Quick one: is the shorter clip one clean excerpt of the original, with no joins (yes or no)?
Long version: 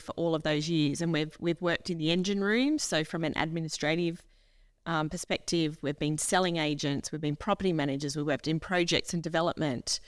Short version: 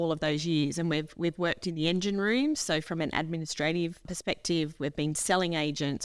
no